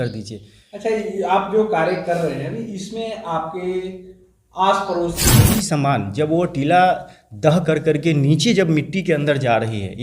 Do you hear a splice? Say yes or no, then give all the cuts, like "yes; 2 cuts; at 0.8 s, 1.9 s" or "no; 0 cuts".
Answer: yes; 1 cut; at 5.2 s